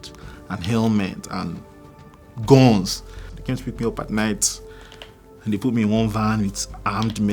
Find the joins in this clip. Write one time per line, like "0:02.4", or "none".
0:03.3